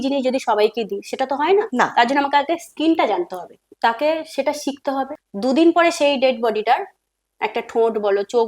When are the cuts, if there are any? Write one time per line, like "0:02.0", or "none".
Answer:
0:05.2